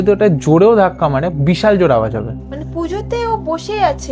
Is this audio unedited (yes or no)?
no